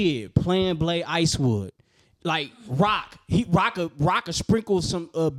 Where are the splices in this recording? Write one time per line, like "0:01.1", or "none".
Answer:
none